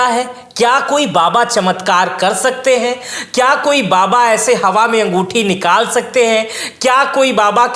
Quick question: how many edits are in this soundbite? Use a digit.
0